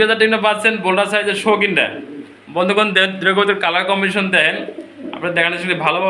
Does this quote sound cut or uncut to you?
uncut